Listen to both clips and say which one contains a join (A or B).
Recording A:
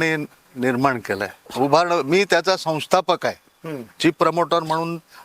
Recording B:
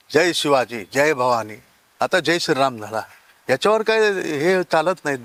A